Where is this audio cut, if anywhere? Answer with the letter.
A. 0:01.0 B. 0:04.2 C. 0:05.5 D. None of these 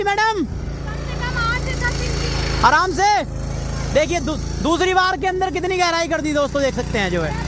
D